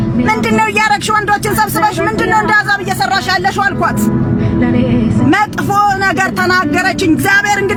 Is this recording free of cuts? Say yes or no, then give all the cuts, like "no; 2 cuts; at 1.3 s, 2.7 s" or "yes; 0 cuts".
yes; 0 cuts